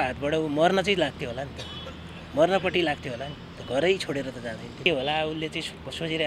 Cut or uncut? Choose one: cut